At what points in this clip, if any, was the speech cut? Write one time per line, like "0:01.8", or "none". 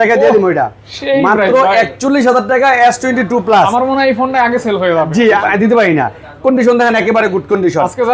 0:05.4